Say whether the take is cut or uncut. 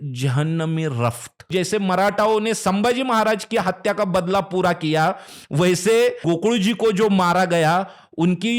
cut